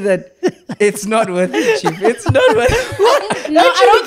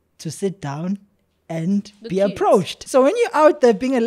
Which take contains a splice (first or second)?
second